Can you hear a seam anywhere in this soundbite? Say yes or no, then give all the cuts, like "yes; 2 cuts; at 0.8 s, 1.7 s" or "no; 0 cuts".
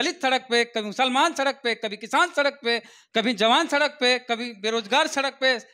no; 0 cuts